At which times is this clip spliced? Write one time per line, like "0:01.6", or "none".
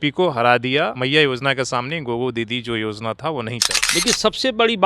0:01.0
0:03.7

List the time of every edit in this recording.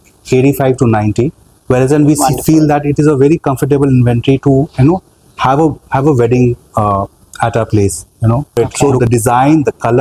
0:08.6

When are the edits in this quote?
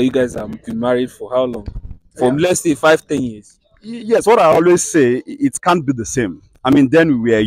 none

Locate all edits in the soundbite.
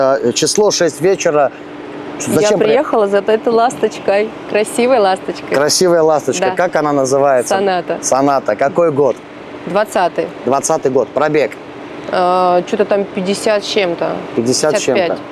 none

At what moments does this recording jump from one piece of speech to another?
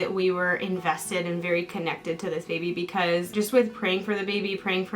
none

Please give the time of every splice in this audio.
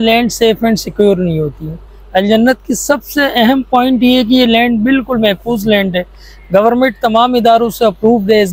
none

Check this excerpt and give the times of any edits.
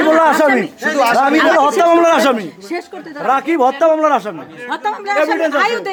none

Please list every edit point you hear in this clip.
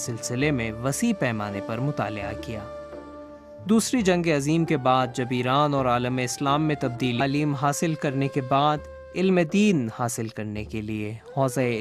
none

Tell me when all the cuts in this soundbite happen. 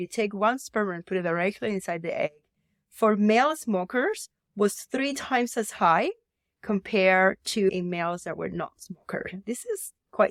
none

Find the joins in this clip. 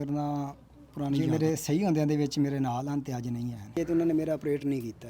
0:01.2
0:03.8

